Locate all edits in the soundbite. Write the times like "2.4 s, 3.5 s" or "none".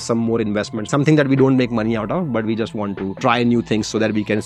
none